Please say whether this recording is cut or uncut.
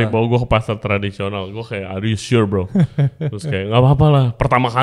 uncut